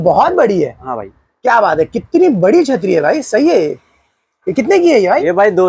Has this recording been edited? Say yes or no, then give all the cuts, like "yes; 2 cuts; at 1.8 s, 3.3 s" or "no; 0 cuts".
no; 0 cuts